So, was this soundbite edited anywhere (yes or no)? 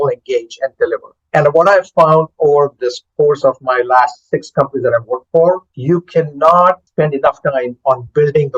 yes